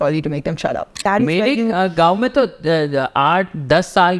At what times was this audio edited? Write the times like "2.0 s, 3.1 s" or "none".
1.0 s